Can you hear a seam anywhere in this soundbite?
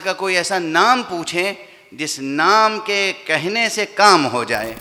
no; 0 cuts

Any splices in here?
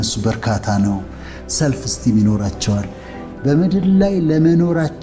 no; 0 cuts

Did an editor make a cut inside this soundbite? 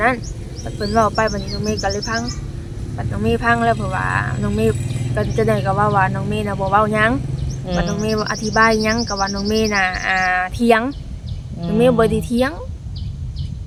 no; 0 cuts

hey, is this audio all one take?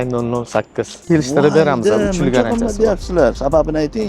no; 1 cut; at 1.0 s

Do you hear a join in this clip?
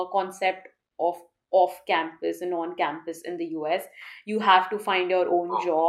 no; 0 cuts

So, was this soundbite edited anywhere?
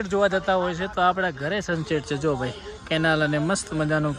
no; 0 cuts

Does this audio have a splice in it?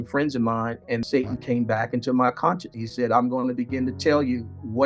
yes; 1 cut; at 1.0 s

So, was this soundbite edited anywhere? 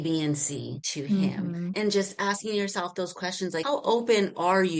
no; 0 cuts

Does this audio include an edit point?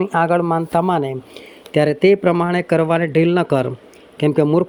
no; 0 cuts

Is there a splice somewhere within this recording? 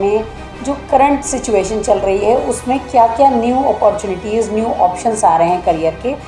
no; 0 cuts

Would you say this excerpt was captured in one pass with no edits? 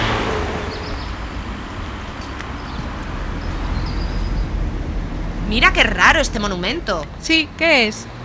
yes; 0 cuts

